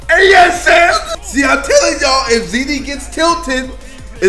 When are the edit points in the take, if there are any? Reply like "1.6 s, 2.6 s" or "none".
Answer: 1.1 s